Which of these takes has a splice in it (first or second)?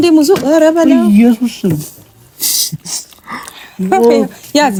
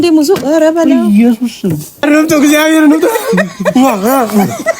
second